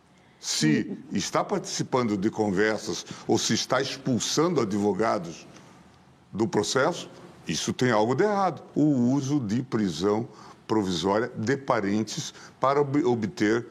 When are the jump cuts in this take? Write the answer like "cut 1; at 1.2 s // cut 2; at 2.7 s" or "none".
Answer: cut 1; at 8.6 s